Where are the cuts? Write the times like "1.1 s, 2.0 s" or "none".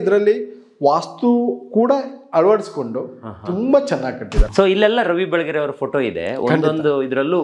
4.4 s